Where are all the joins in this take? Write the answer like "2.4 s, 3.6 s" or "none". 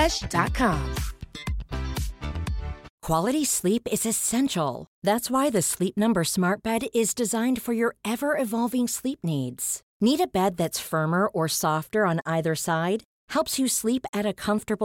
2.9 s